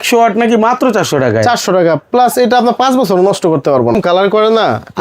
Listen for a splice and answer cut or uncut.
cut